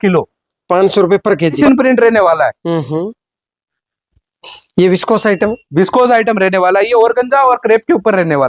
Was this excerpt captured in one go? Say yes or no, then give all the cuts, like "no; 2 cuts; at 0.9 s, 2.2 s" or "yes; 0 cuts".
no; 1 cut; at 1.6 s